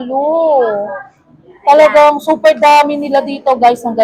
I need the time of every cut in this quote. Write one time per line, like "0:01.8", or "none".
none